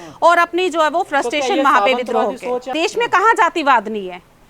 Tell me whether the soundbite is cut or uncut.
cut